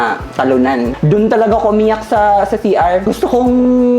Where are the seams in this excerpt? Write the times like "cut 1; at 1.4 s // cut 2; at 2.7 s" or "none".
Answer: cut 1; at 0.9 s // cut 2; at 3.1 s

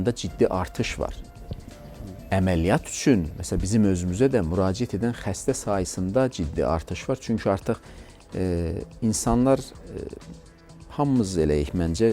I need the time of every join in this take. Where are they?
none

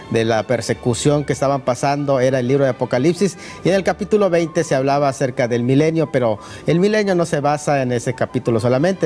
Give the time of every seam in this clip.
cut 1; at 1.8 s

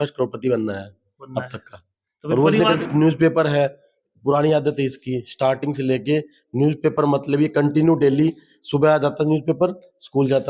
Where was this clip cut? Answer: cut 1; at 2.8 s

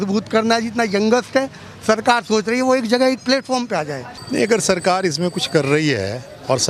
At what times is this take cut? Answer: cut 1; at 4.2 s

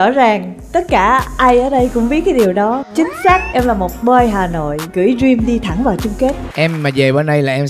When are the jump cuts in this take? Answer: cut 1; at 6.5 s

